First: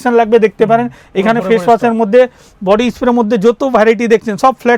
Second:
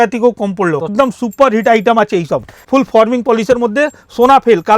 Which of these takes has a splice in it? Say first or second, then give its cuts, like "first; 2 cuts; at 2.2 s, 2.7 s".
second; 2 cuts; at 0.8 s, 2.6 s